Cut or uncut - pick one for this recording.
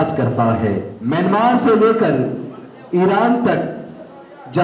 cut